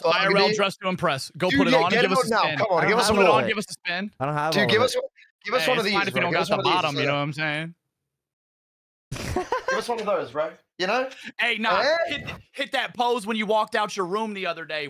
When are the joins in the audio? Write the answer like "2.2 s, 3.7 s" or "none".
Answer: none